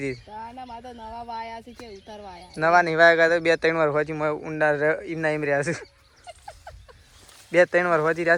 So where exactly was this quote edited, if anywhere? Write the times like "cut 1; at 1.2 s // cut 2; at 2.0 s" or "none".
none